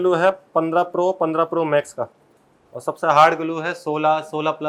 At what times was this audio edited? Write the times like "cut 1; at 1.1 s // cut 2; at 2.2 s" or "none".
none